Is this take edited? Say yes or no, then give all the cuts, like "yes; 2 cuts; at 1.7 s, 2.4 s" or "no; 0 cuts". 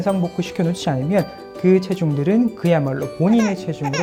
no; 0 cuts